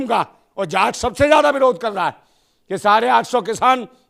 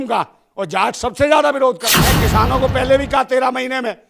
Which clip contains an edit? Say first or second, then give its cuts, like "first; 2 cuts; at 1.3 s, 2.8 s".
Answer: second; 1 cut; at 1.9 s